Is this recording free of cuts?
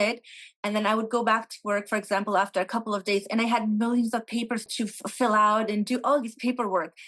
no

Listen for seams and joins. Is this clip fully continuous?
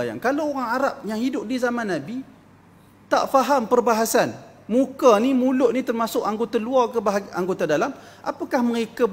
yes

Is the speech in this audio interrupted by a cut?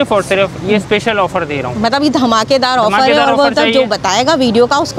no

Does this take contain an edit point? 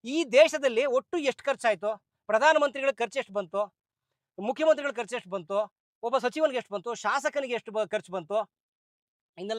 no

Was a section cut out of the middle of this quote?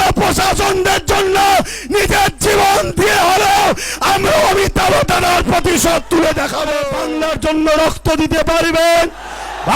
yes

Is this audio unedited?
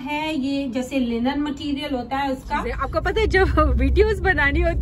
no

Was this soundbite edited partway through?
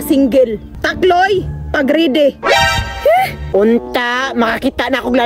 yes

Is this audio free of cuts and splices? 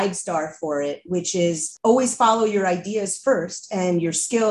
no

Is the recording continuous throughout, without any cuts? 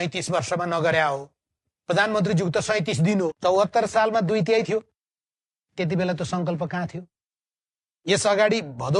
no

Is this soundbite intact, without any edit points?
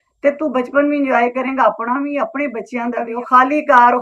no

